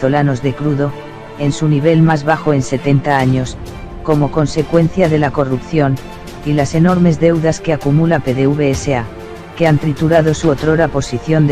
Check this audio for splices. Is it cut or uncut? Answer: cut